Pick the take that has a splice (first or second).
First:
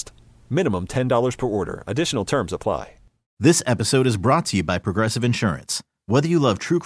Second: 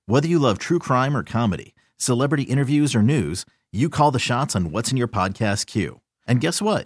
first